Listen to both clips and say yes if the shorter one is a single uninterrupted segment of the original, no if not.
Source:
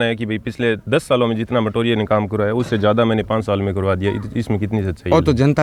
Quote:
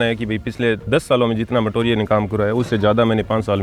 yes